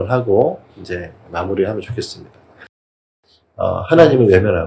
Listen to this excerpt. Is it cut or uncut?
cut